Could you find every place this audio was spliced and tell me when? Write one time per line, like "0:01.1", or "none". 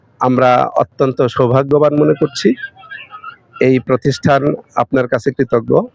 none